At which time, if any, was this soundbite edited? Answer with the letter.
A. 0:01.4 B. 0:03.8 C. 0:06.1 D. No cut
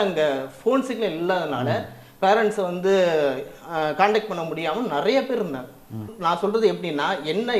C